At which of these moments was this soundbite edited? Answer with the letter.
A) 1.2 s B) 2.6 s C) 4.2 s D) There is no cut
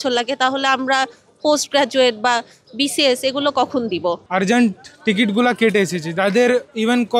C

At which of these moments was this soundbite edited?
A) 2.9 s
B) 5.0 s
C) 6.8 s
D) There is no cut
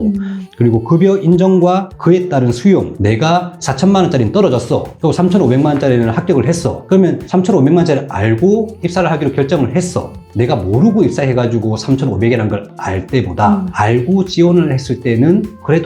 A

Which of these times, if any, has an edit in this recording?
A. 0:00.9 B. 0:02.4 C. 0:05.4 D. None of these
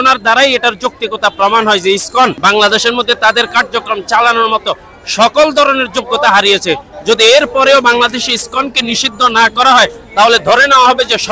B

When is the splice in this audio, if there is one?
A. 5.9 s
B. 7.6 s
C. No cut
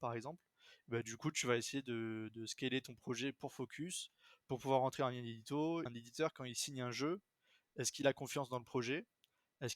A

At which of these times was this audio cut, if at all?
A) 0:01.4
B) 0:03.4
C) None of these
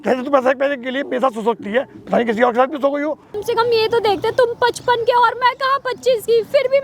B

